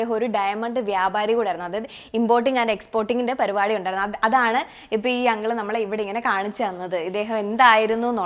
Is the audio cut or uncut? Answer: uncut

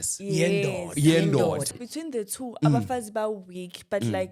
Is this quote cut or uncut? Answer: cut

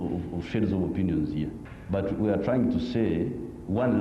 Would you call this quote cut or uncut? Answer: cut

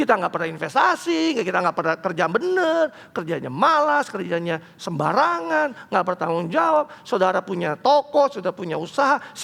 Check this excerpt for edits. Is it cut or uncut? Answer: uncut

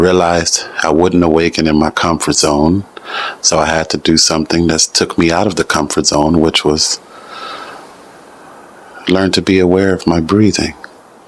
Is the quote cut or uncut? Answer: uncut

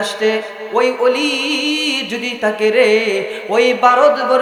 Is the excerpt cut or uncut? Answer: uncut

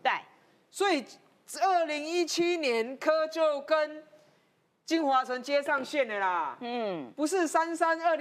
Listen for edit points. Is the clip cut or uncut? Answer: uncut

